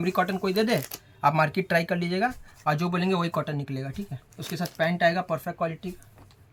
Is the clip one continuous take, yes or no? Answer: yes